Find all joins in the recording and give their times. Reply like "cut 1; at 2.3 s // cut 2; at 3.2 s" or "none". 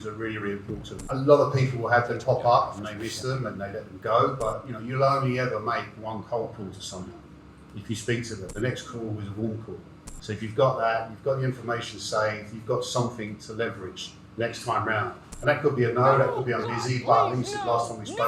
cut 1; at 1.0 s